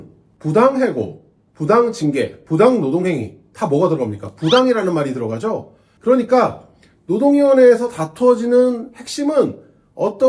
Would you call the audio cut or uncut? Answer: uncut